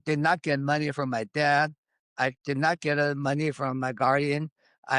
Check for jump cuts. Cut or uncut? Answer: uncut